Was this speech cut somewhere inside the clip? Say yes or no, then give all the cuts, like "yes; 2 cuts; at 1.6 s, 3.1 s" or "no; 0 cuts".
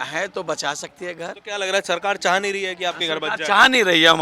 yes; 1 cut; at 1.4 s